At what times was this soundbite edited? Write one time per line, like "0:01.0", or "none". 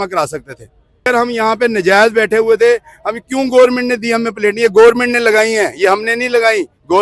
0:01.1